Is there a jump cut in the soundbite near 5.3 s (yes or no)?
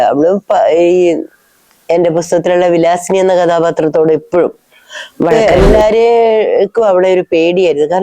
yes